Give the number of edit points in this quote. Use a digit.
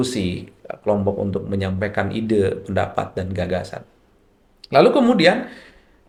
0